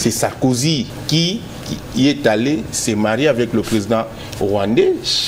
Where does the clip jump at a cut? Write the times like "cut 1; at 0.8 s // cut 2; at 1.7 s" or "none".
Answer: cut 1; at 1.0 s